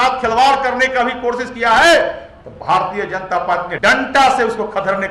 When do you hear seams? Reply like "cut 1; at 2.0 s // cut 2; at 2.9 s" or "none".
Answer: cut 1; at 3.7 s

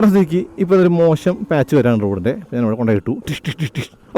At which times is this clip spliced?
none

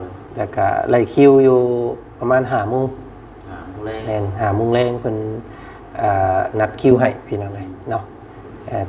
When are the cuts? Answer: none

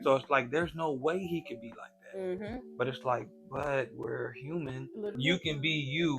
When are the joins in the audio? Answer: cut 1; at 5.1 s

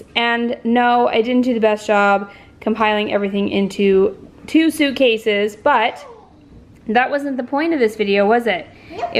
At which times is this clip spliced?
none

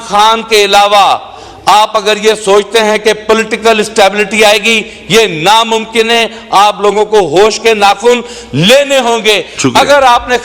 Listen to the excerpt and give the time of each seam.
none

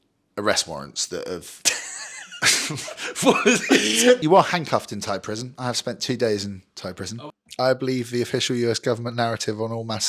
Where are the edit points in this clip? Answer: cut 1; at 4.2 s // cut 2; at 7.1 s

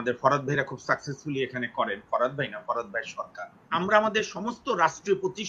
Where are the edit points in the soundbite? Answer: cut 1; at 3.7 s

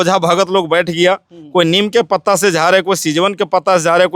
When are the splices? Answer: none

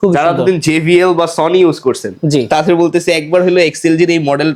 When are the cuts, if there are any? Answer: none

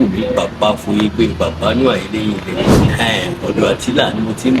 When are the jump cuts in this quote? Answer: cut 1; at 2.8 s

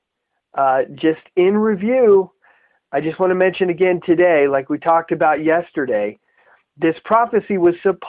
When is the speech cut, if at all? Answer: cut 1; at 7.0 s

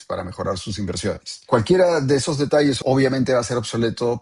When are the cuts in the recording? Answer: cut 1; at 1.5 s // cut 2; at 2.8 s

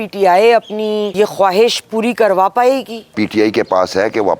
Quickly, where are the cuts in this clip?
cut 1; at 1.1 s // cut 2; at 3.1 s

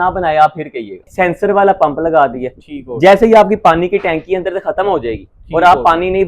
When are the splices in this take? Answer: cut 1; at 1.0 s

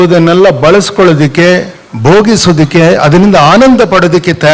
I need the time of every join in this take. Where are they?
none

